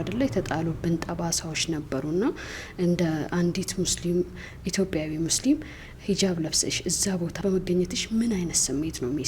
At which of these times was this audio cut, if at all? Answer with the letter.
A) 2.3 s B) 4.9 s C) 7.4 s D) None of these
C